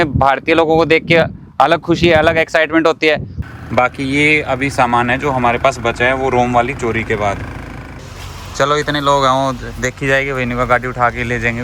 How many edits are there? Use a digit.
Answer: 2